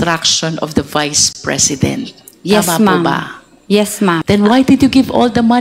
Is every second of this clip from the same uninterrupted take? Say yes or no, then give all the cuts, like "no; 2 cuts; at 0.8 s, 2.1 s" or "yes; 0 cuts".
no; 1 cut; at 4.2 s